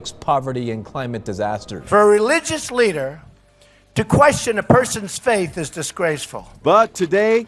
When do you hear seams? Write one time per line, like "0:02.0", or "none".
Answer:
0:01.7